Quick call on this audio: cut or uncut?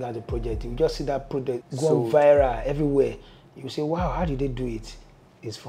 cut